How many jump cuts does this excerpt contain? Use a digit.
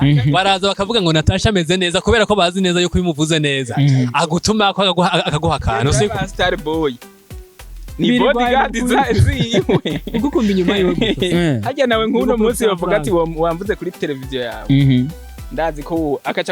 0